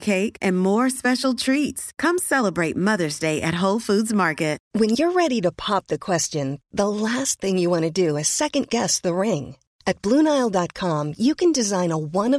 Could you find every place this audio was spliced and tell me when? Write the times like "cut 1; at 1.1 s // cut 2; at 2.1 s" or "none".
cut 1; at 4.6 s